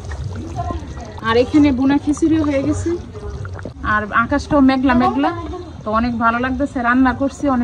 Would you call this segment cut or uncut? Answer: cut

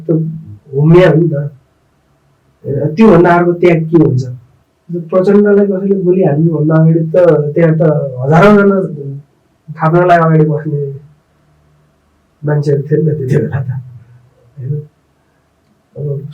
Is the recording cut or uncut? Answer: uncut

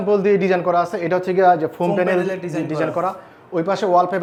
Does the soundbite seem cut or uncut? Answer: uncut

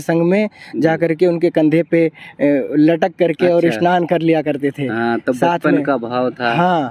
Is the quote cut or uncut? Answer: uncut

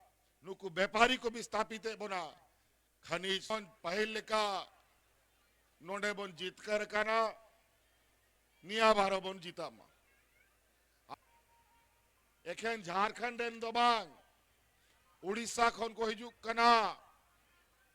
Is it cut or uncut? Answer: cut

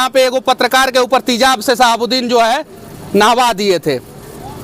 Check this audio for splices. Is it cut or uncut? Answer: uncut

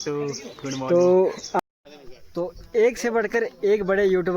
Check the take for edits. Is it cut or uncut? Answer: cut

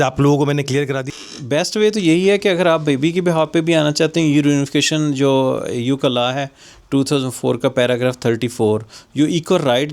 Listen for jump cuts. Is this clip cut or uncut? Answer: cut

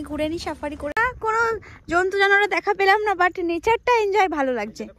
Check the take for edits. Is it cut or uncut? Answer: cut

